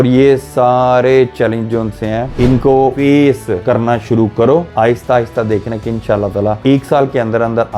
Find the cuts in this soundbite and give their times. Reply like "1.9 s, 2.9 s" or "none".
2.7 s, 3.6 s, 4.7 s